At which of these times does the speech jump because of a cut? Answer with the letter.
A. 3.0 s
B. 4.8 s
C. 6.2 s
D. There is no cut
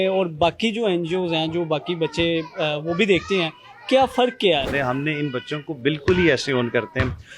B